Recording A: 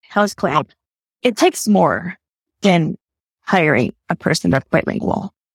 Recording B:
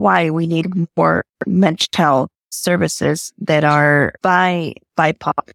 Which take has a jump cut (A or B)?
B